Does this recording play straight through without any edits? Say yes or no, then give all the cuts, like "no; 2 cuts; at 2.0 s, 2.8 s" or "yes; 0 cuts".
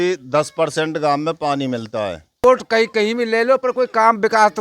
no; 1 cut; at 2.4 s